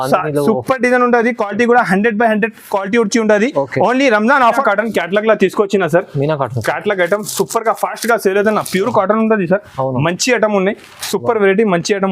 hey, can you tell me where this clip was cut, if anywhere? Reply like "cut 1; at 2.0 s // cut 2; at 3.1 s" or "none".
cut 1; at 4.6 s